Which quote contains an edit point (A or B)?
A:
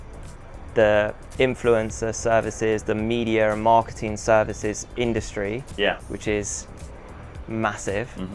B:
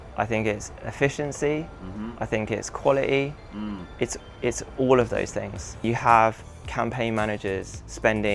B